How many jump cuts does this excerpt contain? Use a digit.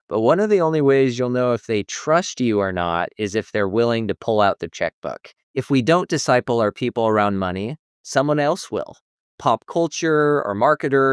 1